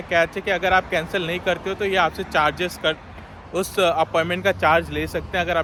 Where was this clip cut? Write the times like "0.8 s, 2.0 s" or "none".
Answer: none